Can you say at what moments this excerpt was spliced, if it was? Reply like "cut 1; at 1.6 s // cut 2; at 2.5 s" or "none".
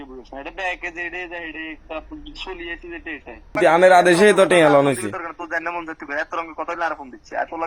cut 1; at 3.6 s